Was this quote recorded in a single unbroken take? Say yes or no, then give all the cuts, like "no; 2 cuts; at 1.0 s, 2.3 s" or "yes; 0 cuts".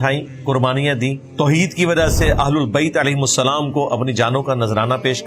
no; 1 cut; at 1.3 s